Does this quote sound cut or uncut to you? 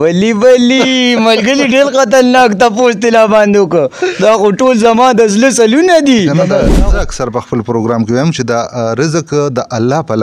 cut